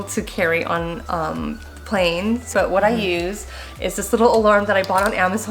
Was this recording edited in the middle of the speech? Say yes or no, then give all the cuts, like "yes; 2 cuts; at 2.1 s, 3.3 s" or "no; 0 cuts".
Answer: yes; 1 cut; at 2.5 s